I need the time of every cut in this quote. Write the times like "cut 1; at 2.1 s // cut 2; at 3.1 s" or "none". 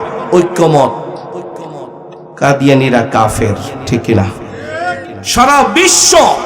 cut 1; at 5.1 s